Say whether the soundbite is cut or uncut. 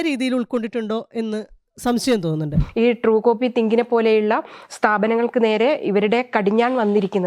cut